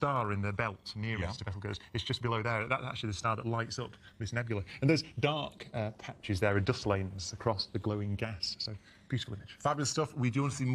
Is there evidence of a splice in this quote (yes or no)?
yes